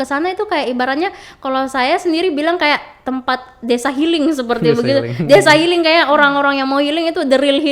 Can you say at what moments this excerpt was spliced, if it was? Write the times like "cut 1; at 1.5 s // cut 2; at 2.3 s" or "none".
none